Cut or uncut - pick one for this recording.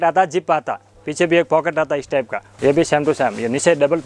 cut